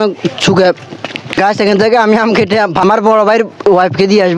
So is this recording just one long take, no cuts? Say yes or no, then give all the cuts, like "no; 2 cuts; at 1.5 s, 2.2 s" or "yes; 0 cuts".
no; 2 cuts; at 1.3 s, 2.8 s